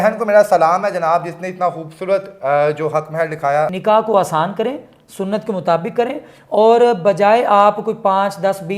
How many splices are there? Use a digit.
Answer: 1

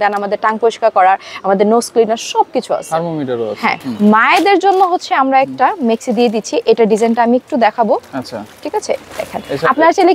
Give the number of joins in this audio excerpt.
1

